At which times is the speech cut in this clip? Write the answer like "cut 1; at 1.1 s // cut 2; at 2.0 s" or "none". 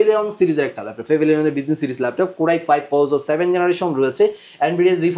none